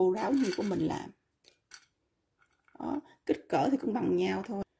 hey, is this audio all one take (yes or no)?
yes